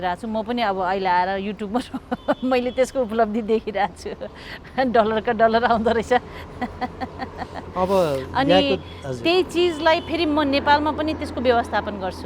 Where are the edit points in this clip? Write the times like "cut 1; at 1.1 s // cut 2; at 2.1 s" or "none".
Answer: none